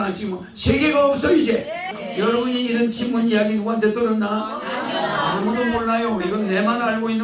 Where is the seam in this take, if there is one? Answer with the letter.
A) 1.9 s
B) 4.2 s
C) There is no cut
A